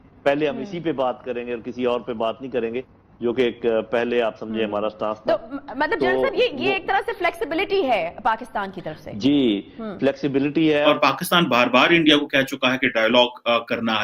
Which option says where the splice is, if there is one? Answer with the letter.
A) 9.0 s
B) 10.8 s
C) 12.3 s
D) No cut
B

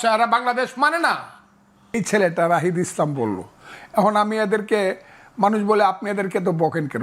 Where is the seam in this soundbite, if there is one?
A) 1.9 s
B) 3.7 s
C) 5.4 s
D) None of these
A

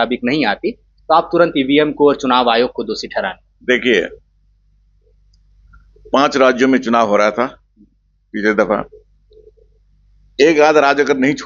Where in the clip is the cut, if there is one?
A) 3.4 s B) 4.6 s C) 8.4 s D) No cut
D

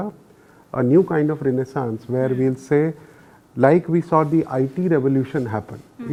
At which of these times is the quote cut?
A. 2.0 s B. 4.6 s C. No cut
C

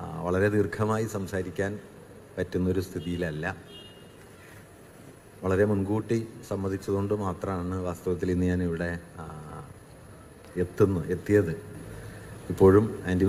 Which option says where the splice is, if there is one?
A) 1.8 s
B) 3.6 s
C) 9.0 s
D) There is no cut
B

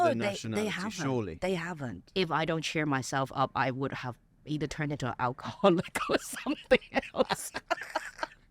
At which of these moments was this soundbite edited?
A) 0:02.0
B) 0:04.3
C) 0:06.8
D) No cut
A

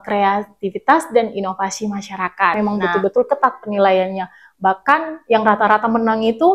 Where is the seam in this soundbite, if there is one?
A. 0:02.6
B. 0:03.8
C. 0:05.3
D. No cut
A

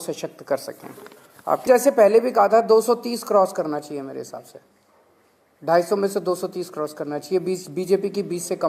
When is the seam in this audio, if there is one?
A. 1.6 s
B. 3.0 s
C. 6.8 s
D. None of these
A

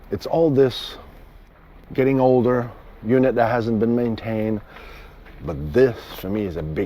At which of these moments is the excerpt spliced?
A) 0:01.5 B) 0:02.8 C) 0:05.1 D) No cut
A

